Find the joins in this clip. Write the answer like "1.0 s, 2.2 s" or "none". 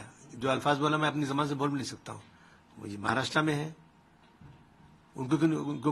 none